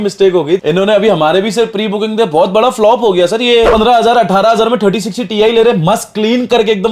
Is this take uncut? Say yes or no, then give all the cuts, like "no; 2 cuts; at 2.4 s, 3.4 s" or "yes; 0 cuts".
no; 1 cut; at 3.7 s